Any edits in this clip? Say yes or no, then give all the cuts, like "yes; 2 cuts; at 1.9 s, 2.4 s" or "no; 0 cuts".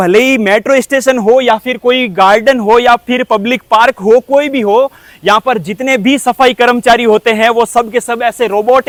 no; 0 cuts